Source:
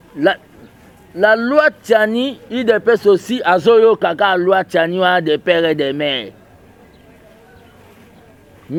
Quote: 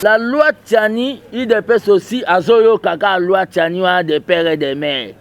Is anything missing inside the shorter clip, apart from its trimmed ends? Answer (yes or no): no